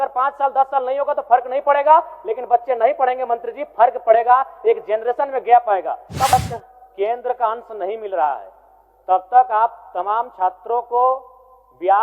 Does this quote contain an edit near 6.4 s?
yes; 1 cut; at 6.4 s

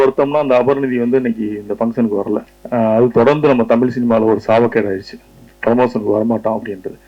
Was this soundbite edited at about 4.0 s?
no; 1 cut; at 2.6 s

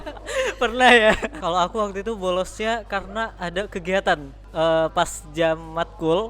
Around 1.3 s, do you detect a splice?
yes; 2 cuts; at 1.3 s, 4.4 s

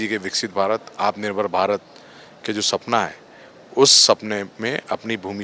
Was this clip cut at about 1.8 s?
no; 0 cuts

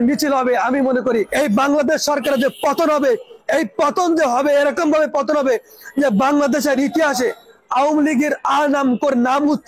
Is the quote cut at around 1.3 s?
yes; 1 cut; at 1.3 s

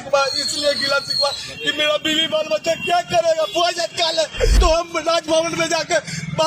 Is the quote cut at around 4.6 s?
yes; 1 cut; at 4.6 s

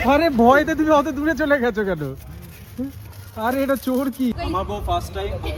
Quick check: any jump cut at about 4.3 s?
yes; 1 cut; at 4.3 s

